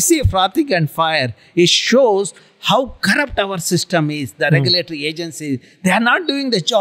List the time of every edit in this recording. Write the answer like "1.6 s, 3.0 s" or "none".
none